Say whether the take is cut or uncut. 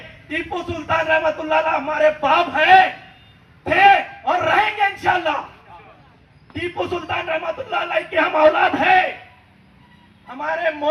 uncut